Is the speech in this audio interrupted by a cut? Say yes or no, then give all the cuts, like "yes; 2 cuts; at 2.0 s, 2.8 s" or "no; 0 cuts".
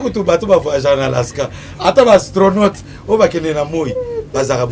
no; 0 cuts